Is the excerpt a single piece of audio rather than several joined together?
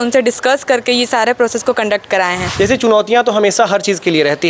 no; 1 cut; at 2.4 s

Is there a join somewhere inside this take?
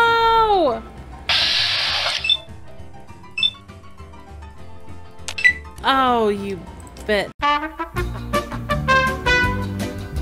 no; 0 cuts

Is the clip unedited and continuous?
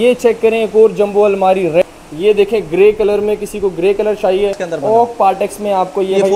no; 2 cuts; at 1.9 s, 4.6 s

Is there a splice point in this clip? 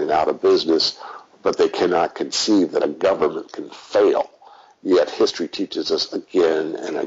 no; 0 cuts

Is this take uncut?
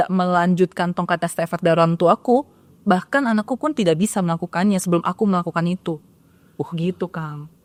yes; 0 cuts

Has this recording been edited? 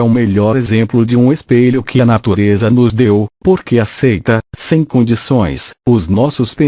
yes; 1 cut; at 4.9 s

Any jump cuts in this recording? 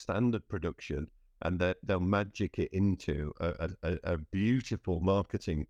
no; 0 cuts

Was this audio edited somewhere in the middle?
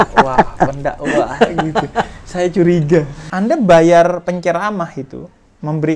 yes; 1 cut; at 3.2 s

